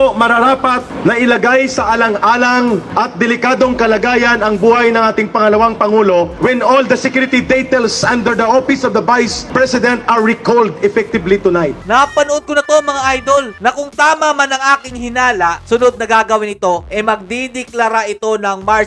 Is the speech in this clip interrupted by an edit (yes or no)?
yes